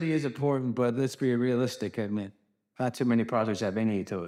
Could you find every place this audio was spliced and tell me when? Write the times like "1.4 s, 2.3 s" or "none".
none